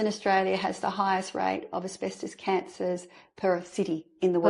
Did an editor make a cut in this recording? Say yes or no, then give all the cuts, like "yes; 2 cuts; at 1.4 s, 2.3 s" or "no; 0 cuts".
no; 0 cuts